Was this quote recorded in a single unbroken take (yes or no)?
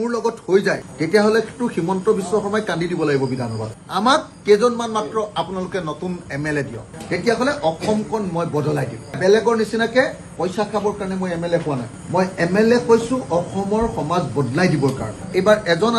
no